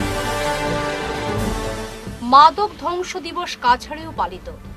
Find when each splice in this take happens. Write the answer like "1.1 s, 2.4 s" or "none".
none

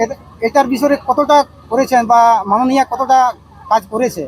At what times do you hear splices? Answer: none

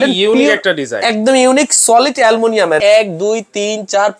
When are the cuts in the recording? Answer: 2.8 s

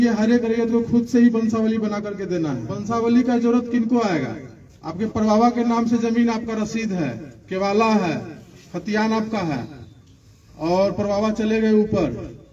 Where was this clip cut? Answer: 2.8 s

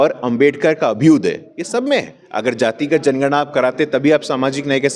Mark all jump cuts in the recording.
2.2 s

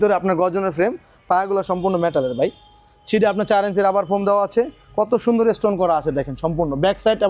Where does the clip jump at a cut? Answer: none

